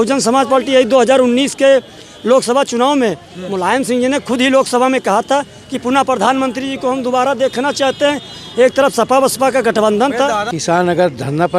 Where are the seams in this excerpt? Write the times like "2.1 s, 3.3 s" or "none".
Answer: 10.5 s